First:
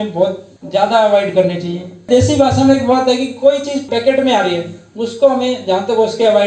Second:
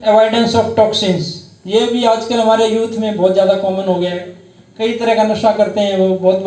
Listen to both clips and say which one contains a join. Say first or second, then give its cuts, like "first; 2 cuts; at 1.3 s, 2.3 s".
first; 2 cuts; at 2.0 s, 3.8 s